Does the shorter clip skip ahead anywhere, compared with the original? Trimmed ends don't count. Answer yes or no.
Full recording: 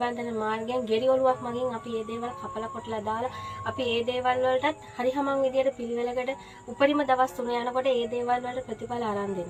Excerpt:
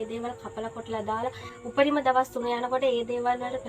yes